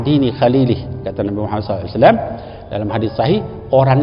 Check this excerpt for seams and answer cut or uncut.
uncut